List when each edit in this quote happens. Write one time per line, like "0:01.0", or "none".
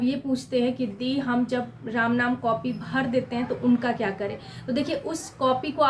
none